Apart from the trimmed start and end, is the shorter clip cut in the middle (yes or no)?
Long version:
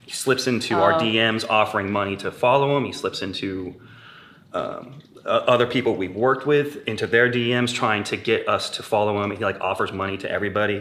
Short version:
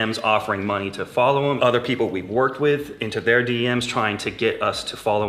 yes